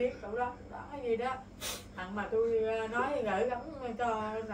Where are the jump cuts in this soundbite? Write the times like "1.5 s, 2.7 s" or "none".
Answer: none